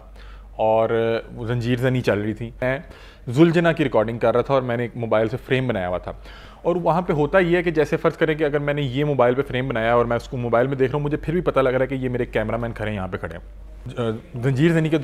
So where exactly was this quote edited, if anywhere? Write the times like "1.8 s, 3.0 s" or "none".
2.6 s, 13.8 s